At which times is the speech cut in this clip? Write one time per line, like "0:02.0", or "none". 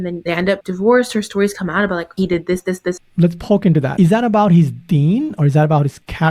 0:03.0
0:03.9